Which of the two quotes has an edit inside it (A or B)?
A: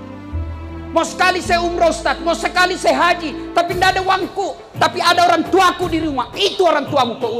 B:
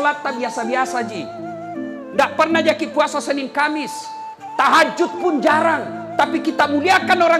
A